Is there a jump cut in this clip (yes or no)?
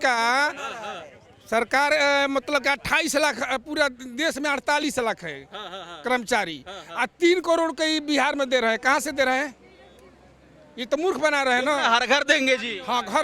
no